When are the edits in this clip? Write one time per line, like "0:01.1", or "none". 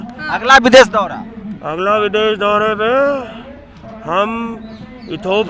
none